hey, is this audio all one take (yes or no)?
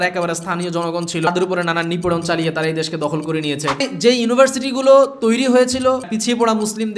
no